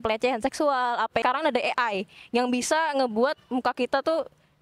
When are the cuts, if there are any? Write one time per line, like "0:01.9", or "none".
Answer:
0:01.2